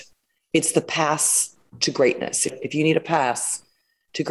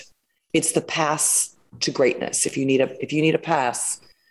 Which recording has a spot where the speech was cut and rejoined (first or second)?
first